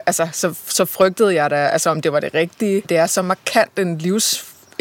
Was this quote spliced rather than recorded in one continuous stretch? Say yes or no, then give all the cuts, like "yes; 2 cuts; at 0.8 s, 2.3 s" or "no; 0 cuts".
yes; 1 cut; at 2.9 s